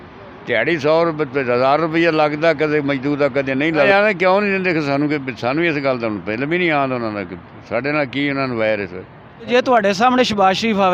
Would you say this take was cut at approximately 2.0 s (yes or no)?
no